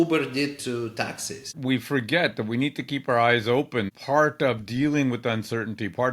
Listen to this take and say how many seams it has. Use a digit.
2